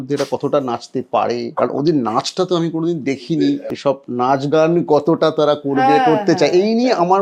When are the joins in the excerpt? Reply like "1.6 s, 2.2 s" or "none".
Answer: 1.5 s, 3.6 s